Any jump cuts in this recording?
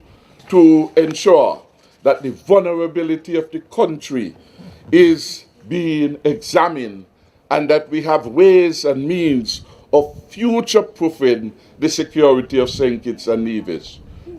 no; 0 cuts

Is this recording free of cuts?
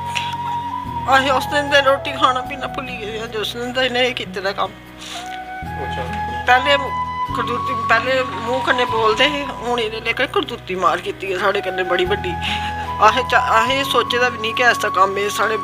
no; 1 cut; at 1.0 s

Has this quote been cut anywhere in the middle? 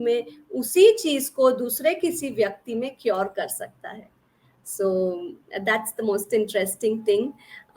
no; 0 cuts

